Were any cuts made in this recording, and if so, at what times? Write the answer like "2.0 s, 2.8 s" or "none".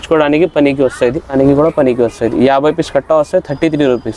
1.3 s